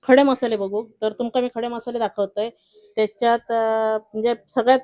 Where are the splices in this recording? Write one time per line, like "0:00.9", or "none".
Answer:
none